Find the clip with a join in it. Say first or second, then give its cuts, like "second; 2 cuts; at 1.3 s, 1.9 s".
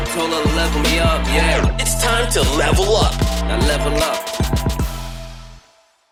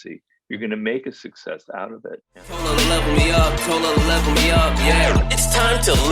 second; 1 cut; at 2.6 s